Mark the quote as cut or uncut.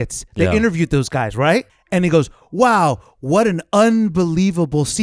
cut